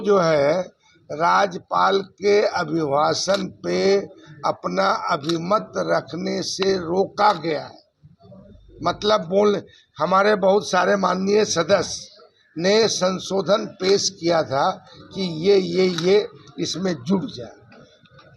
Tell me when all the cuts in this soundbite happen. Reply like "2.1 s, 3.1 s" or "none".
none